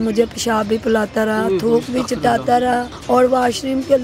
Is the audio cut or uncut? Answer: cut